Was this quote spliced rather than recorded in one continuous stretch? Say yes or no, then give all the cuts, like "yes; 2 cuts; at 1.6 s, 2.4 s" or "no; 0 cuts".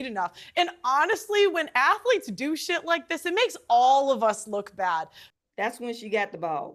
yes; 1 cut; at 5.2 s